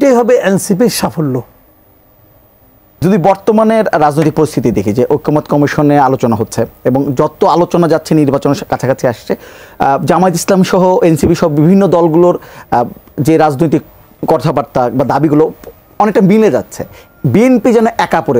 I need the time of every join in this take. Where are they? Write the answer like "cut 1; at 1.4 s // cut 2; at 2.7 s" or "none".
cut 1; at 3.0 s